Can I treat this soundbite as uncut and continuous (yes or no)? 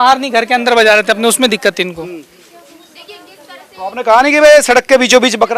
yes